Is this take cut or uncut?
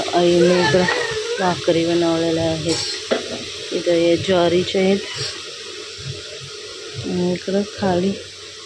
uncut